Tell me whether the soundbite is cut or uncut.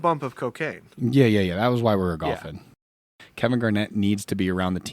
cut